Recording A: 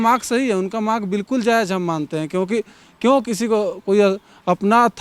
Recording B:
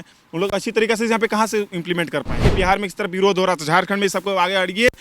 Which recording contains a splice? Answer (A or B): B